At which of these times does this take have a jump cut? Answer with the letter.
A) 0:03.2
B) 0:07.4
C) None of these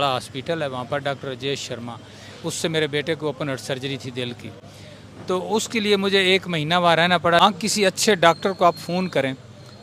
B